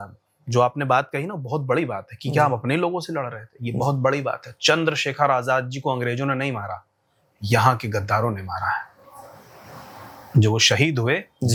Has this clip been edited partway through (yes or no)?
no